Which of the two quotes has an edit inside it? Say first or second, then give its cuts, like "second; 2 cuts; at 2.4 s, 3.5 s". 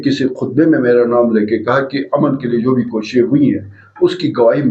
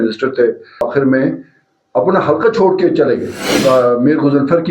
second; 2 cuts; at 0.8 s, 3.5 s